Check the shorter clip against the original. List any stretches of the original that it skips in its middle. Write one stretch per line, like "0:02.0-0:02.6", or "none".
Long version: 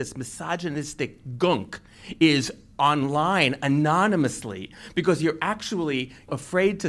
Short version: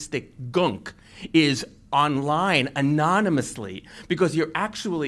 none